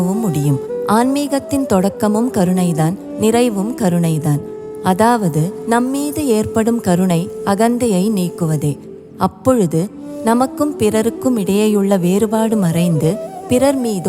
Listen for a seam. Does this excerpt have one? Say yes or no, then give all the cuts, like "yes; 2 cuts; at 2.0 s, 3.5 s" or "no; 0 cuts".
no; 0 cuts